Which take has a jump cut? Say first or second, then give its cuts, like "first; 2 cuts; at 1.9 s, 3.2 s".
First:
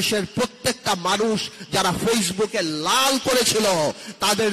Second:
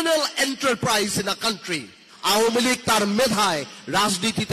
second; 1 cut; at 2.0 s